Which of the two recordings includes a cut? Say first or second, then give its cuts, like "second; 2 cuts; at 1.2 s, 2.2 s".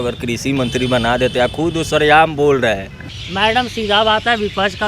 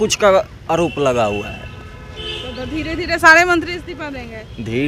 first; 1 cut; at 3.2 s